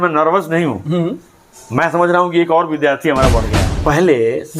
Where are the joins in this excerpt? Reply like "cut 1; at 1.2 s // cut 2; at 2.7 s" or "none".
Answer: cut 1; at 3.5 s